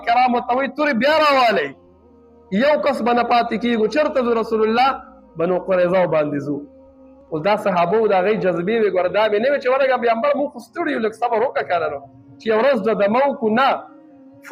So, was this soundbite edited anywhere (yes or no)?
no